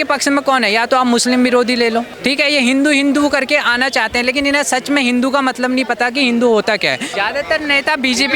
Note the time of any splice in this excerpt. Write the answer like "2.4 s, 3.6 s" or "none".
2.1 s, 7.1 s